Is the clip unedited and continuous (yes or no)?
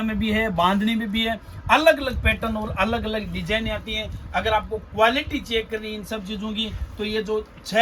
yes